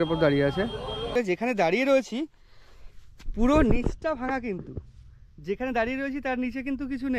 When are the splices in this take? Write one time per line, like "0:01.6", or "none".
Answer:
0:01.1